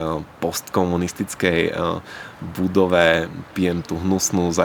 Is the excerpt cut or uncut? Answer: uncut